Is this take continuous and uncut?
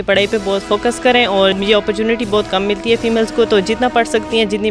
no; 1 cut; at 1.5 s

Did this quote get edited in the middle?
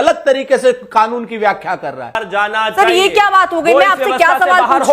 yes; 1 cut; at 2.3 s

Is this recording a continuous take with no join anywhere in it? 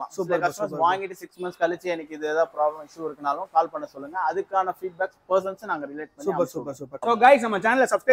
no; 1 cut; at 7.0 s

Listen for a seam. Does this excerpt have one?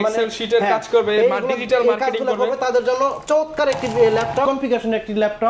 yes; 1 cut; at 4.5 s

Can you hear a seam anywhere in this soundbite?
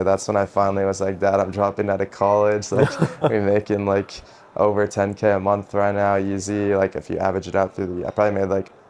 no; 0 cuts

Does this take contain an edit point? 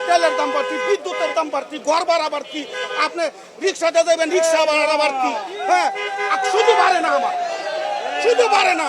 no; 0 cuts

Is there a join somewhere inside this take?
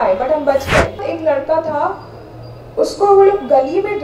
yes; 1 cut; at 1.1 s

